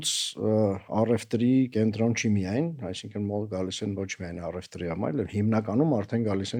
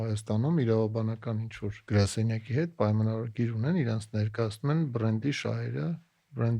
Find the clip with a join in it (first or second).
second